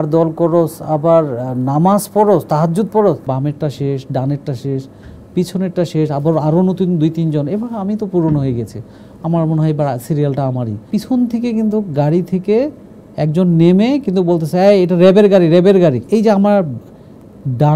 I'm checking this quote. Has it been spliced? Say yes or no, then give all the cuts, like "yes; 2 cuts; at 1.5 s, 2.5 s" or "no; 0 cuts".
yes; 3 cuts; at 3.2 s, 10.8 s, 16.0 s